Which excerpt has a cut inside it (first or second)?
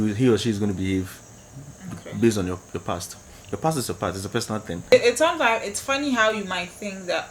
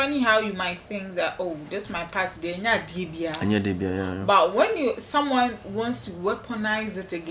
first